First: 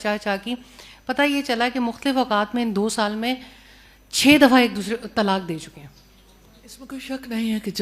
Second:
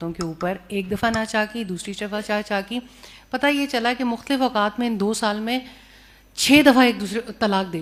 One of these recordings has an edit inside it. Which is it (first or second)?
first